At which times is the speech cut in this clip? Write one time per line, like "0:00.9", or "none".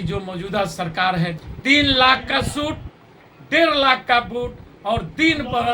0:01.5